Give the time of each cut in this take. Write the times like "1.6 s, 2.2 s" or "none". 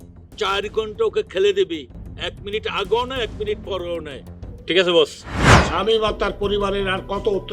none